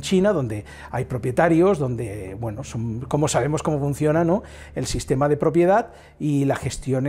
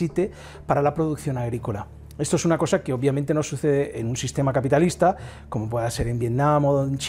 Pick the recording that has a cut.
second; 1 cut; at 5.3 s

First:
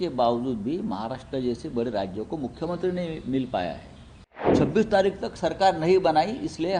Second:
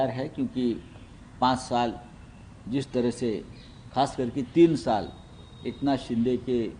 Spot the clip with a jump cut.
first; 1 cut; at 4.5 s

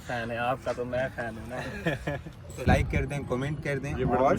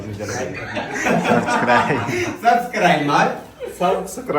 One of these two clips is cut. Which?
first; 1 cut; at 2.7 s

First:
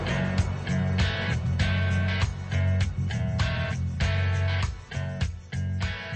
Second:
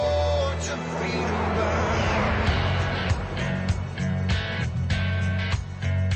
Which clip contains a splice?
first; 1 cut; at 4.1 s

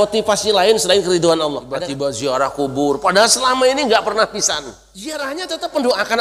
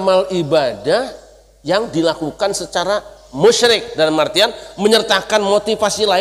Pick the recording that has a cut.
first; 2 cuts; at 1.9 s, 5.2 s

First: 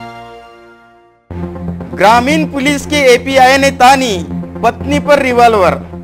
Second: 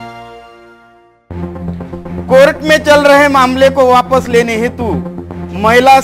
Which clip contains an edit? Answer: second; 1 cut; at 1.8 s

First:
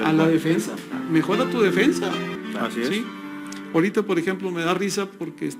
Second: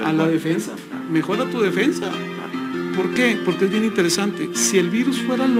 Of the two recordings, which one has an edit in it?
first; 1 cut; at 2.4 s

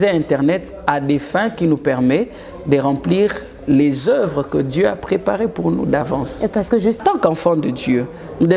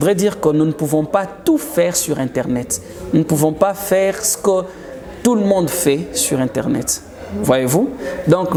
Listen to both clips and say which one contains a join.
first; 1 cut; at 7.0 s

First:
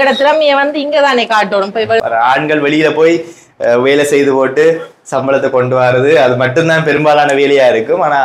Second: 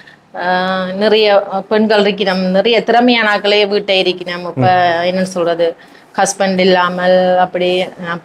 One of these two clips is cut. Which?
first; 1 cut; at 2.0 s

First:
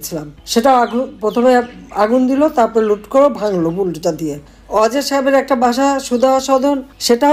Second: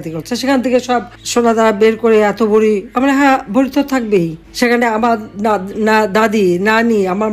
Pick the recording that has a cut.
second; 1 cut; at 1.2 s

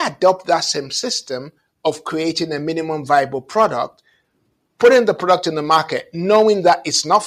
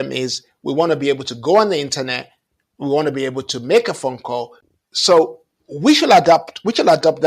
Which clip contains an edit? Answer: second; 1 cut; at 4.6 s

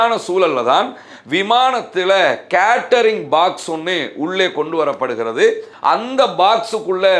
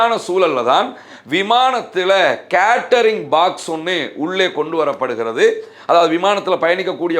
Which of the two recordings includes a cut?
first; 1 cut; at 5.7 s

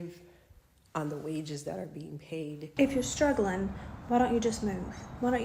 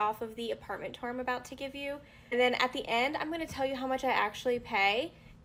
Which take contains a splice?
first; 1 cut; at 2.6 s

